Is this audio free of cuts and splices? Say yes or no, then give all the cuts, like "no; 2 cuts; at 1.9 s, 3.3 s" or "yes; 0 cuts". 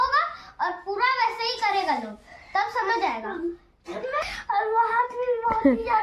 no; 1 cut; at 4.3 s